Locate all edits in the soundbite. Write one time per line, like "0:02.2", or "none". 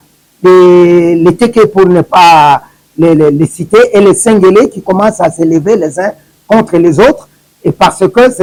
none